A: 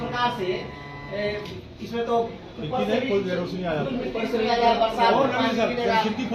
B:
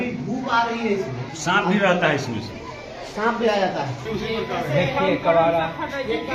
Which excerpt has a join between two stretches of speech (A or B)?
B